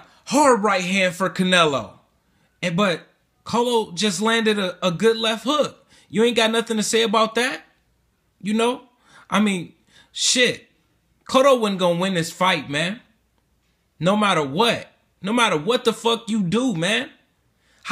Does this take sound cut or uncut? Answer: uncut